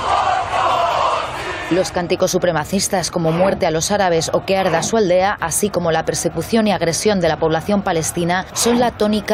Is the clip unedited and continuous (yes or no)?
yes